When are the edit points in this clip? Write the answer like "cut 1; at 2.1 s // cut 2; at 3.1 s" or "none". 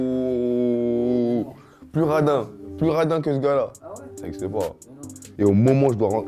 cut 1; at 5.2 s